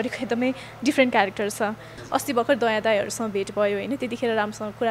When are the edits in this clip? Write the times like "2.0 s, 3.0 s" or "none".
1.9 s